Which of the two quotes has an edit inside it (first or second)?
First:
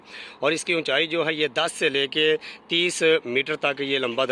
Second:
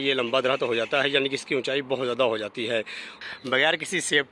second